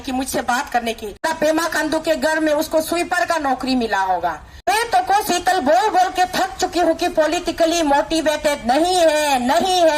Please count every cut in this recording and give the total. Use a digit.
2